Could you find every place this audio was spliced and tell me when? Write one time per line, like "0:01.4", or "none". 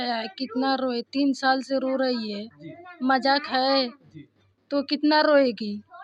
none